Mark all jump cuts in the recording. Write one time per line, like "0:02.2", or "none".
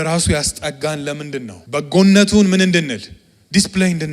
0:01.6